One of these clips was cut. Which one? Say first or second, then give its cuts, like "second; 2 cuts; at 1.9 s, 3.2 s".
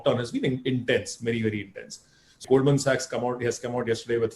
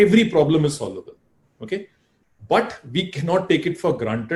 first; 1 cut; at 2.4 s